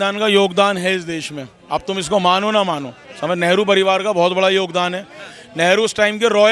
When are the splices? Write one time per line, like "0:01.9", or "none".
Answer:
none